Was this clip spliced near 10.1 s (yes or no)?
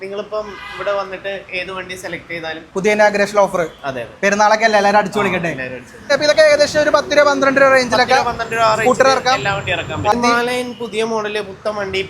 yes